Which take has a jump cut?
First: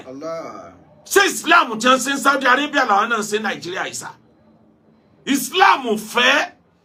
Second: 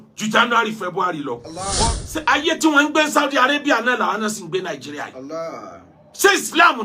second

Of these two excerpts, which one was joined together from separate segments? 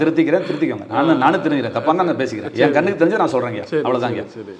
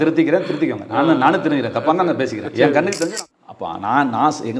second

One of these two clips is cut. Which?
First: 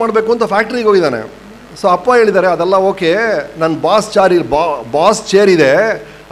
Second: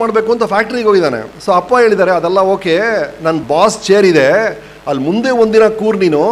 second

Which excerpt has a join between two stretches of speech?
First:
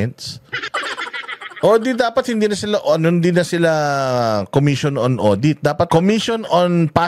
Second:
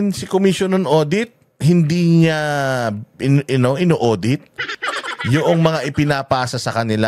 first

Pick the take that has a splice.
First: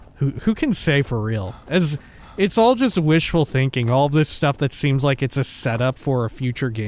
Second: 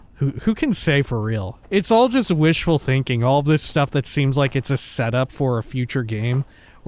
second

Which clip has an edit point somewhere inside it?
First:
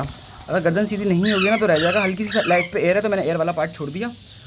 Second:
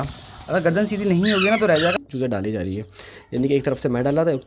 second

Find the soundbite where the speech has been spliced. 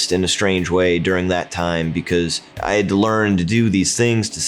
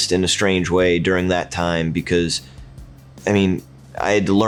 first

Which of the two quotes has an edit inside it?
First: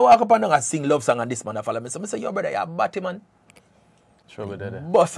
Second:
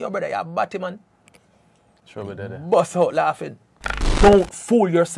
second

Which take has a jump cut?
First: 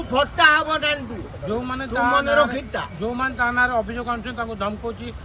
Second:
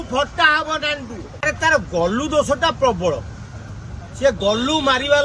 second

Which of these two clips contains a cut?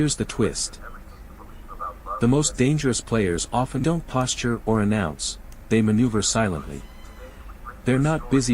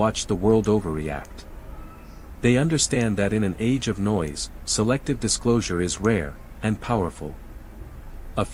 first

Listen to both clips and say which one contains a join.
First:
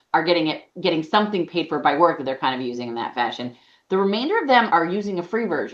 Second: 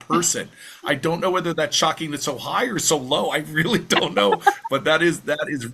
first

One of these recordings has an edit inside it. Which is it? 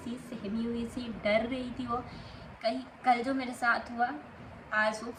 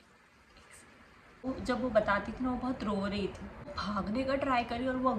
second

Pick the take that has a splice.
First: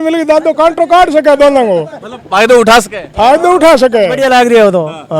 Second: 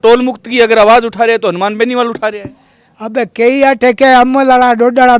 first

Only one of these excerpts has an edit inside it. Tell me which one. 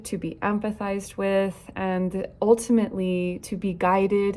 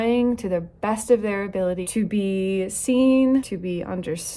second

